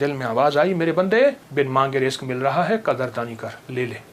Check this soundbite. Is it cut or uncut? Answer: cut